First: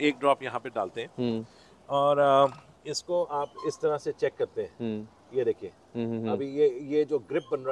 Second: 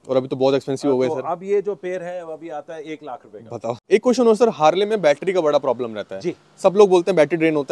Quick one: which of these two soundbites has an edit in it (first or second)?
second